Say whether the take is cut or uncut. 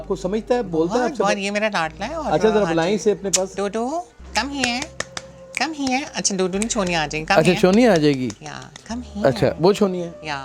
uncut